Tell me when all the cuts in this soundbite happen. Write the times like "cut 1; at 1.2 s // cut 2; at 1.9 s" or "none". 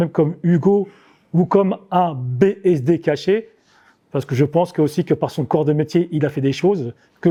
none